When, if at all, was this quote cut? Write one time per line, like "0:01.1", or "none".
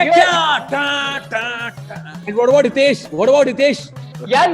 0:02.2

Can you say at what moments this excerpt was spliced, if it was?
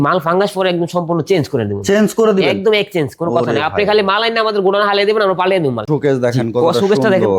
0:05.9

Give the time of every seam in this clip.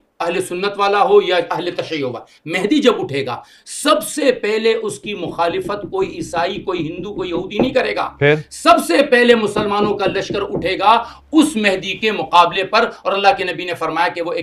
none

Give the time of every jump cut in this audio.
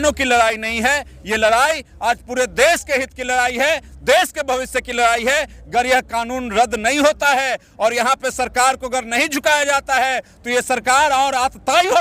none

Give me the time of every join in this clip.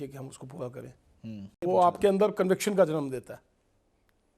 0:01.5

